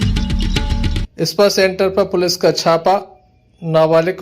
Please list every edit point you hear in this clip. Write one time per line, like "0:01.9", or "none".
0:01.1